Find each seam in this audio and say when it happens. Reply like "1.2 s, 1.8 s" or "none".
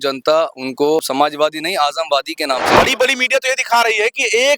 1.0 s, 2.8 s